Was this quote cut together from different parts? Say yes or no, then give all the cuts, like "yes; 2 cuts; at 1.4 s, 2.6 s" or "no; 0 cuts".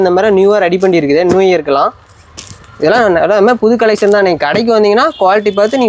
no; 0 cuts